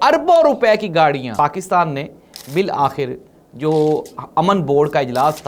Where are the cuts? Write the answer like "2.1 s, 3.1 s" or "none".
1.3 s